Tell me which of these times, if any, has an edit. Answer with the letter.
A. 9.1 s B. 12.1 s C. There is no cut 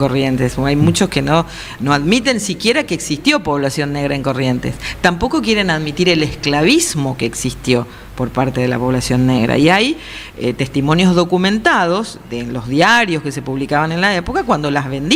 C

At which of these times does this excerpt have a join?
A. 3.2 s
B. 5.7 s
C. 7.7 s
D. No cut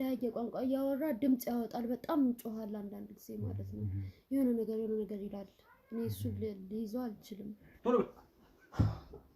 C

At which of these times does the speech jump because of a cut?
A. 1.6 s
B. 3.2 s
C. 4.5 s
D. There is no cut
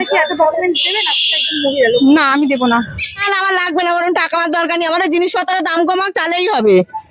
B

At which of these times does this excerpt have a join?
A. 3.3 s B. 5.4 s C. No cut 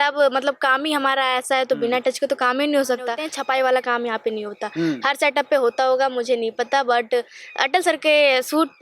A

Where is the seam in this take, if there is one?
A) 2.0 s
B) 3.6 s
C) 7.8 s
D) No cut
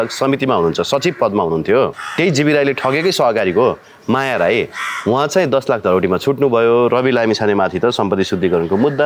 A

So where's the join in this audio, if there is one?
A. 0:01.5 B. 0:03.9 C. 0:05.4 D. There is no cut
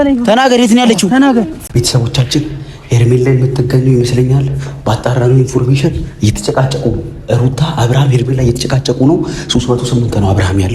A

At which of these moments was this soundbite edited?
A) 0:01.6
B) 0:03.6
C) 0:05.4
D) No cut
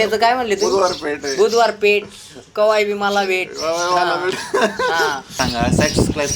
C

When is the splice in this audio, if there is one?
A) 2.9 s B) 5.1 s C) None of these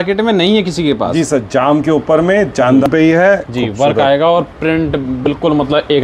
A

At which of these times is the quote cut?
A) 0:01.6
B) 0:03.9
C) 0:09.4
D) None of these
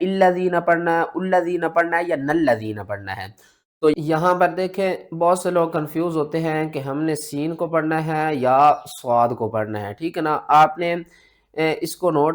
B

